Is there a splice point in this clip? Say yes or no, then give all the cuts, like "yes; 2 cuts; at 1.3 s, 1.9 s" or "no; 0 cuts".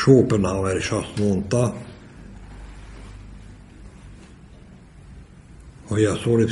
no; 0 cuts